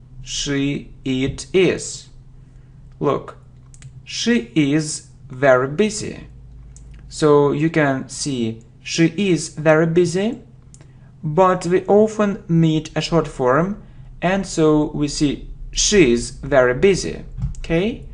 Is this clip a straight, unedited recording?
yes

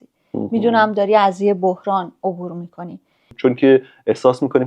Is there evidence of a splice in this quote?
yes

